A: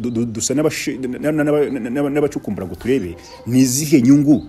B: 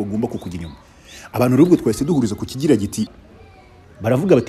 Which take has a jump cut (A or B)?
B